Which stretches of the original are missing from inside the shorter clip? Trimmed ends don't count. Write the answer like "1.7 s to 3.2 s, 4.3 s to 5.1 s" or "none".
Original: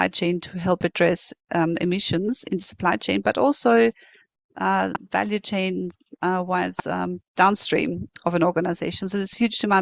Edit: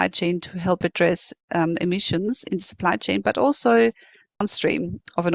4.4 s to 7.5 s